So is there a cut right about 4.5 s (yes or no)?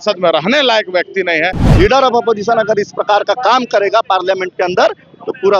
no